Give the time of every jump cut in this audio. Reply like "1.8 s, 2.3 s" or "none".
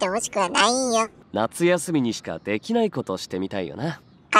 1.2 s